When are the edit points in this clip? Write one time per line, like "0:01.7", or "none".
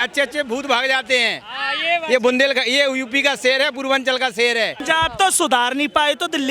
0:04.8

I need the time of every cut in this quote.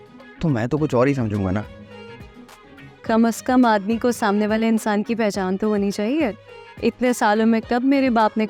none

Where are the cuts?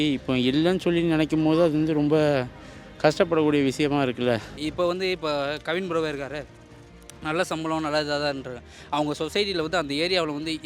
0:04.5

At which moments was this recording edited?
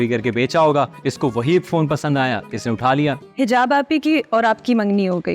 0:03.2

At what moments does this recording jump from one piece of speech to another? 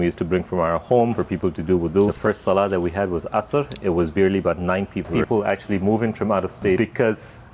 0:01.2
0:02.2
0:05.1
0:06.8

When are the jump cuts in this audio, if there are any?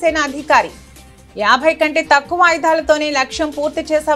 none

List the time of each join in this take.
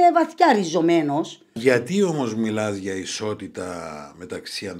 0:01.4

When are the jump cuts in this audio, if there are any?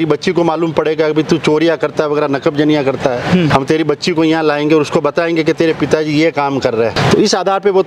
0:03.5
0:07.0

